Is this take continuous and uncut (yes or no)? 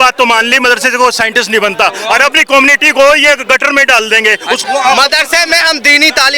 no